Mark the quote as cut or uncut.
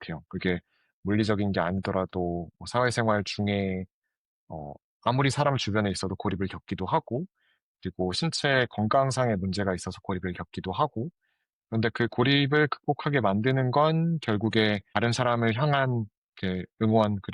cut